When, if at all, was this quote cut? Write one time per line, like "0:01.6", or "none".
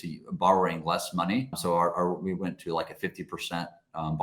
0:01.6